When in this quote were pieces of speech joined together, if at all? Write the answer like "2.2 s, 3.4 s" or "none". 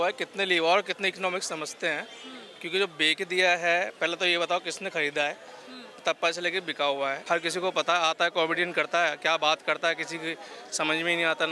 7.2 s